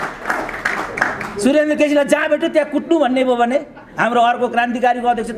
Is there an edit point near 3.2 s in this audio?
no; 0 cuts

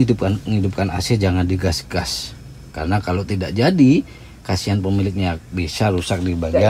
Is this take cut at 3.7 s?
no; 0 cuts

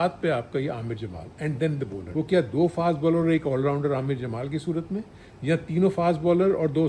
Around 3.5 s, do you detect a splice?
no; 1 cut; at 2.0 s

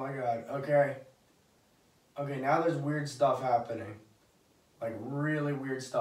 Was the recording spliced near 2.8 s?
no; 0 cuts

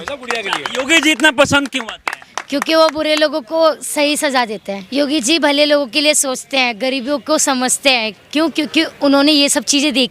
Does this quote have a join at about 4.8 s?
yes; 1 cut; at 4.8 s

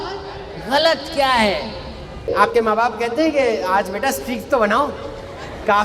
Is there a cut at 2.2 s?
yes; 1 cut; at 2.2 s

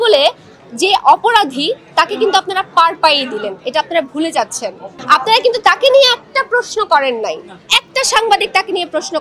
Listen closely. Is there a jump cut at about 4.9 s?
no; 0 cuts

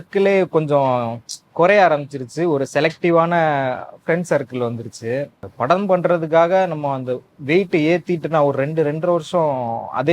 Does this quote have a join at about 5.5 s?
yes; 1 cut; at 5.5 s

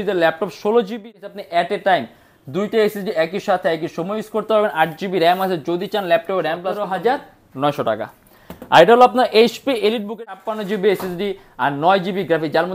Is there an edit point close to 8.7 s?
no; 3 cuts; at 1.1 s, 6.8 s, 10.1 s

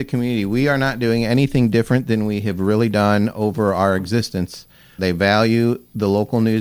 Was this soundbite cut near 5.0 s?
yes; 1 cut; at 5.0 s

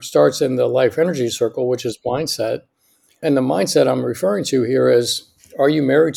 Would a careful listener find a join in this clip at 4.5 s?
no; 1 cut; at 3.2 s

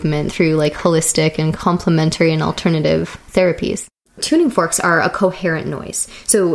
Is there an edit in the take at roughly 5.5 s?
no; 2 cuts; at 1.5 s, 3.9 s

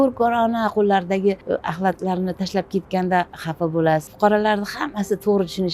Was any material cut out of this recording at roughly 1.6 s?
yes; 2 cuts; at 1.6 s, 4.1 s

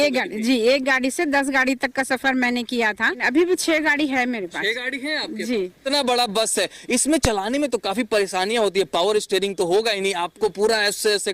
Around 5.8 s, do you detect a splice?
yes; 2 cuts; at 3.2 s, 5.8 s

